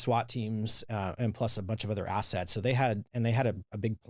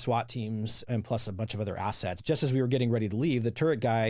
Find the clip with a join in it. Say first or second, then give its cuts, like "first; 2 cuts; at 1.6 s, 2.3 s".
second; 2 cuts; at 0.8 s, 2.2 s